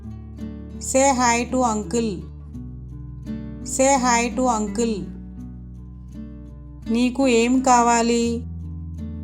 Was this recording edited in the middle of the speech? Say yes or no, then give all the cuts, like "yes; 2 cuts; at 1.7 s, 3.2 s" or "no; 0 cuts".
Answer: yes; 5 cuts; at 2.3 s, 3.6 s, 5.0 s, 6.9 s, 8.4 s